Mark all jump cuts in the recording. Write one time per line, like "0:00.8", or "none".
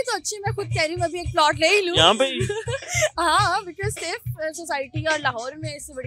none